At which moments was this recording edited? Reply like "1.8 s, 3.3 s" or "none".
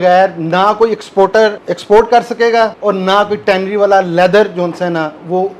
1.7 s, 2.8 s